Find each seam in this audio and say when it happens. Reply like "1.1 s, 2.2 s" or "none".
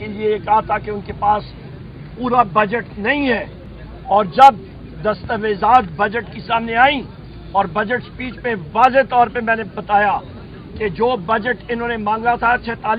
none